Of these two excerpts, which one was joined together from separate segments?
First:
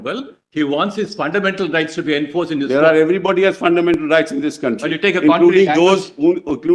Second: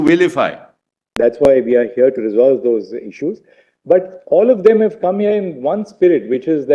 second; 1 cut; at 1.1 s

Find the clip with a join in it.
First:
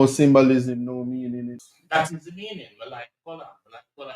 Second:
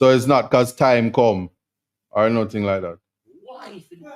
first; 1 cut; at 1.6 s

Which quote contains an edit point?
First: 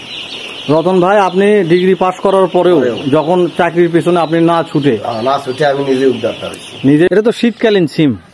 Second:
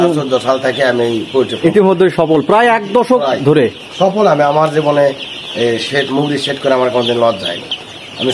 first; 1 cut; at 7.1 s

